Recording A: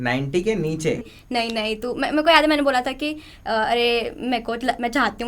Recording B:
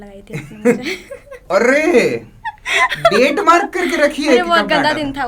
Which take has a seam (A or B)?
A